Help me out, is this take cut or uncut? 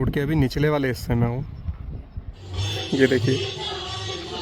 cut